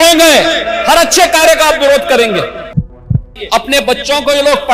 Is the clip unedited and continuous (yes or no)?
no